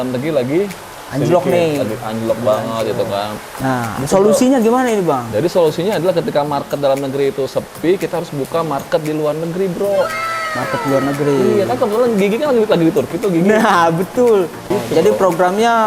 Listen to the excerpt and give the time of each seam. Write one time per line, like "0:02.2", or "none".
0:03.5
0:14.7